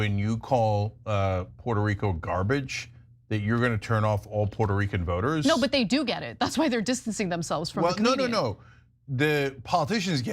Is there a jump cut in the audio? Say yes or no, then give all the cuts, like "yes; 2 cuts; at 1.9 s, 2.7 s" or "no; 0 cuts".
yes; 1 cut; at 5.4 s